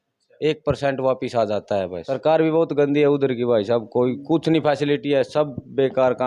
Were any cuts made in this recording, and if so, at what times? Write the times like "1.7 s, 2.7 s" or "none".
2.0 s